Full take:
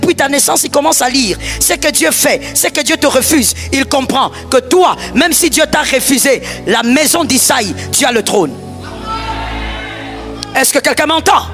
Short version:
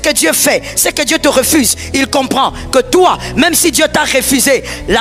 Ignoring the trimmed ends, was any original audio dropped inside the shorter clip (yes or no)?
no